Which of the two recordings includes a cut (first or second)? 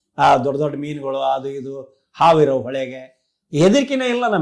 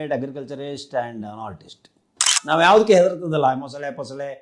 second